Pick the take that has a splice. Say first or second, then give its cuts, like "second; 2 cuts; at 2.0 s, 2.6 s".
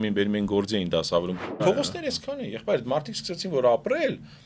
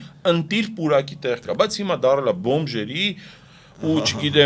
first; 1 cut; at 1.6 s